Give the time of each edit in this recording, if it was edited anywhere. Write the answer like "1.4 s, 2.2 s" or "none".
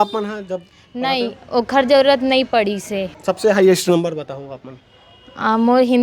3.4 s